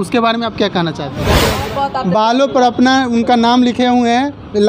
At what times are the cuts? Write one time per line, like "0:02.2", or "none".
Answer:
0:01.5